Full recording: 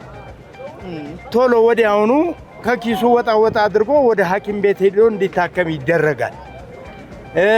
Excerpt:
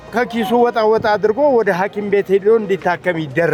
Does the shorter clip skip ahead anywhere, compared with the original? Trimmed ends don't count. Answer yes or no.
no